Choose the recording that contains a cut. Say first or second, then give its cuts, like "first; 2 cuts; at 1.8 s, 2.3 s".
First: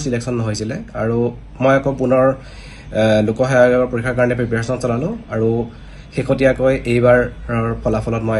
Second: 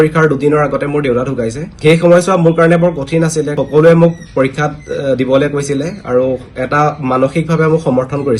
second; 2 cuts; at 1.7 s, 3.5 s